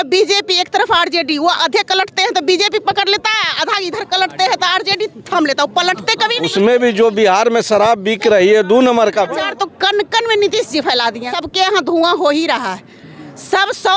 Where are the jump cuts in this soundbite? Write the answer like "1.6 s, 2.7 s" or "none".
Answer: 6.4 s, 9.4 s, 11.4 s